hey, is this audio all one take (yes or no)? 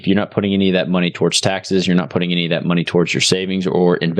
yes